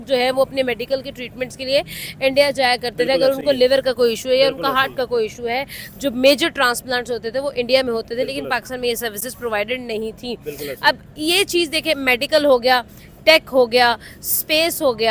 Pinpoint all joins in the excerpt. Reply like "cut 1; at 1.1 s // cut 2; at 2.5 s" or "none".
none